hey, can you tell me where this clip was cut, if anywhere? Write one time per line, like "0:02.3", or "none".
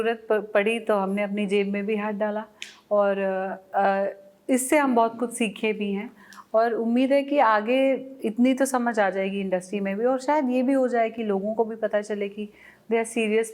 none